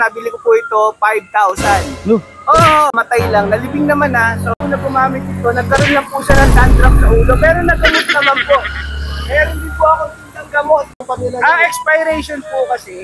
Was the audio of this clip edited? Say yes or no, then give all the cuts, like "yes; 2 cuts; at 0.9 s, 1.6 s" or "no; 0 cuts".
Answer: yes; 2 cuts; at 4.5 s, 11.0 s